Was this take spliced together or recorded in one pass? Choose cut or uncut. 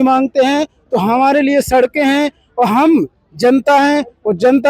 uncut